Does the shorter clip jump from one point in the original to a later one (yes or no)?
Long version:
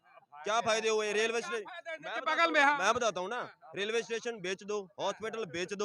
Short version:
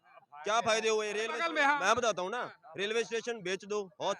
yes